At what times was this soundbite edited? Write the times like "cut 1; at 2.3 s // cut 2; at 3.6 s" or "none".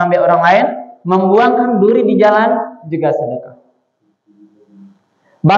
none